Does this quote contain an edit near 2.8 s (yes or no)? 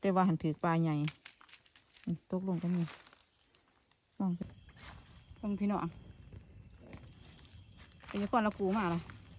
no